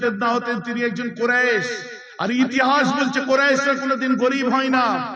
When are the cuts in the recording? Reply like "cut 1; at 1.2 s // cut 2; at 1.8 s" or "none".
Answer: none